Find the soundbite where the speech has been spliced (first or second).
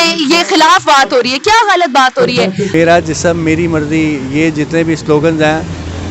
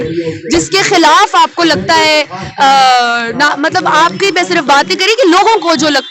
first